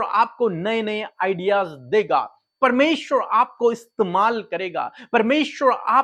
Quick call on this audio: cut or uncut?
uncut